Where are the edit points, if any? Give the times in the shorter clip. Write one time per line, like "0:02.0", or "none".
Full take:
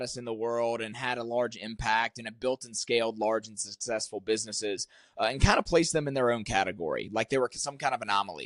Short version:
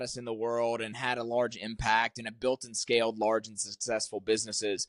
none